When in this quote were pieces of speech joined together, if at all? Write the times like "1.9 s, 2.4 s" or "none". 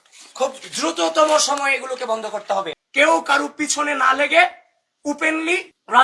2.7 s